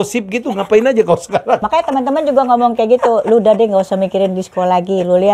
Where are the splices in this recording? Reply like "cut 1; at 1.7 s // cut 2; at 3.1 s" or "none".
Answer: cut 1; at 1.6 s